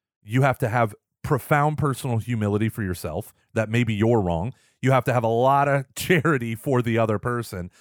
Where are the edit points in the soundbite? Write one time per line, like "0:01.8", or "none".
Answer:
none